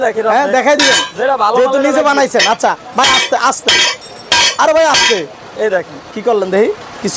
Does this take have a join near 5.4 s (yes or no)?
no